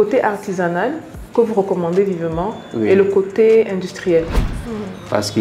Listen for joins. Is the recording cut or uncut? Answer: cut